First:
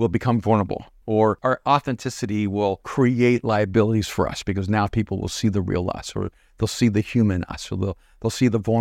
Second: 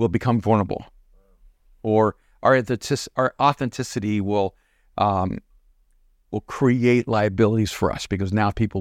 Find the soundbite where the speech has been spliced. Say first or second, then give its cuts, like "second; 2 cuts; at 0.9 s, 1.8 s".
first; 2 cuts; at 1.2 s, 2.9 s